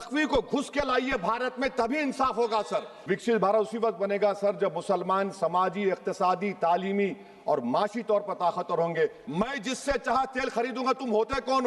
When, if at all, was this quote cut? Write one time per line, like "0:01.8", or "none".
0:02.9
0:09.2